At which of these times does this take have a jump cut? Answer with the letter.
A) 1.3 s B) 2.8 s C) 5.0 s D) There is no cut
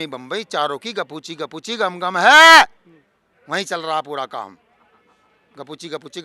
D